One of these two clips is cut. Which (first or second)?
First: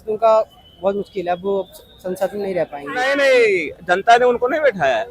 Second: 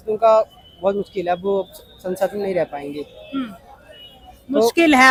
first